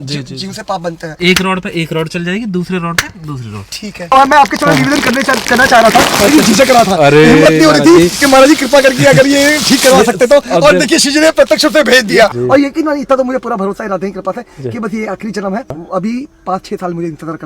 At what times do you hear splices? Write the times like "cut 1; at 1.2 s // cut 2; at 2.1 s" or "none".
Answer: cut 1; at 1.2 s // cut 2; at 4.1 s // cut 3; at 12.3 s // cut 4; at 15.9 s